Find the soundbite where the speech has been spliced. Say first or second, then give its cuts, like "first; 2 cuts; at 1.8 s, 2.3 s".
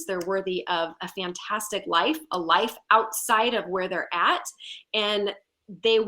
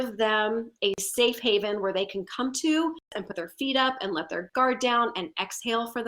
second; 1 cut; at 3.1 s